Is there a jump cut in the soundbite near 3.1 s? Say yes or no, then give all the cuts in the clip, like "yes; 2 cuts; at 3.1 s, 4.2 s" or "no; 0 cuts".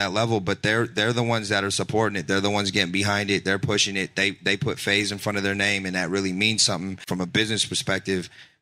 no; 1 cut; at 7.0 s